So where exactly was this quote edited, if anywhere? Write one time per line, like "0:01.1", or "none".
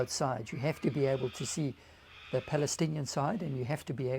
none